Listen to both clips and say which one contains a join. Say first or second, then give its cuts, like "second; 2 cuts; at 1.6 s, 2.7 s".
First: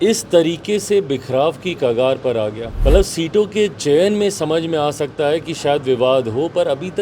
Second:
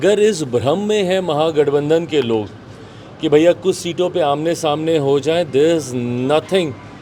first; 1 cut; at 2.7 s